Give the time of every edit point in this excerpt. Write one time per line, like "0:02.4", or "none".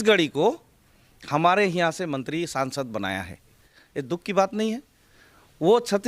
0:03.3